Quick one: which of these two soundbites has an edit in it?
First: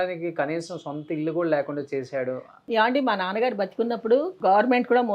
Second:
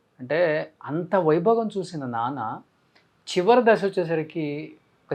first; 2 cuts; at 2.5 s, 4.3 s

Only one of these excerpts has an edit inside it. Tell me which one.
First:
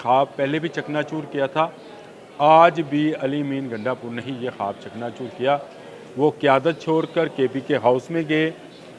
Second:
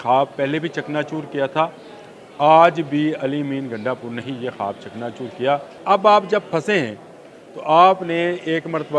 second; 1 cut; at 5.7 s

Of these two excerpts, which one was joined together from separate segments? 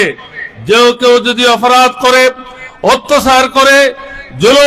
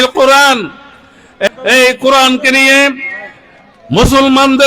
second; 1 cut; at 1.5 s

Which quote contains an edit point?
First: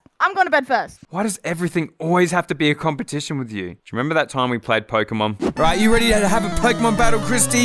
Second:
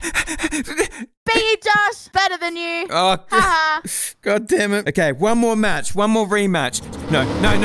first; 1 cut; at 1.0 s

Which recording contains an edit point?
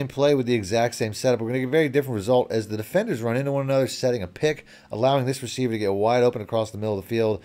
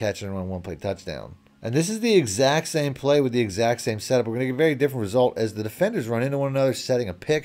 second; 1 cut; at 1.4 s

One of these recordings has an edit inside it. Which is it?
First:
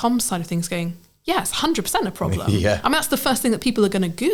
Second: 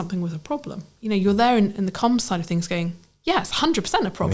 second; 1 cut; at 0.9 s

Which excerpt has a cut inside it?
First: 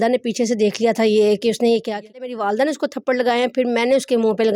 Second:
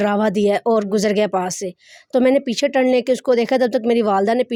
first; 1 cut; at 2.3 s

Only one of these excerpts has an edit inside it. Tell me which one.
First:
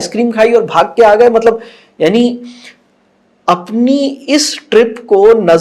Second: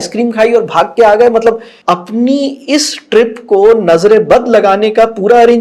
second; 1 cut; at 1.7 s

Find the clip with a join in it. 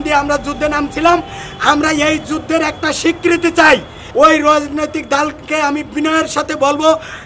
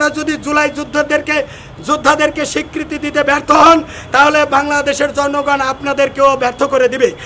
first; 1 cut; at 4.0 s

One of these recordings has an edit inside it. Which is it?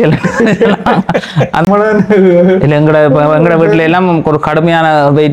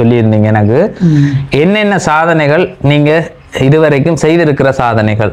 first; 1 cut; at 1.7 s

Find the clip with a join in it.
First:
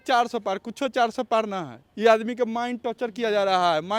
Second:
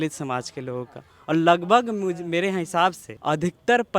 second; 1 cut; at 3.1 s

